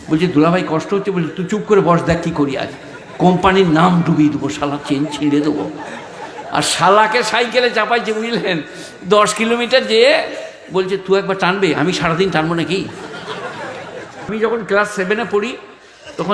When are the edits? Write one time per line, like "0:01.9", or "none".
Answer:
0:14.3